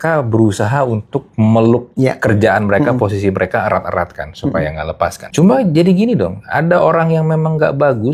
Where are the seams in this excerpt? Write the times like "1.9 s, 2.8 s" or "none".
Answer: 1.2 s, 1.9 s, 5.2 s